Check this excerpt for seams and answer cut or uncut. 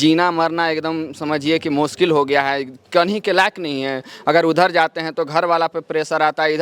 uncut